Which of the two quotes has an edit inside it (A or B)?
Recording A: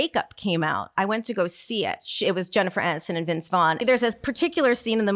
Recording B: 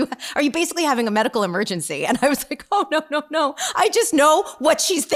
A